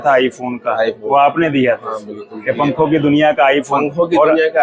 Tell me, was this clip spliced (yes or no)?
no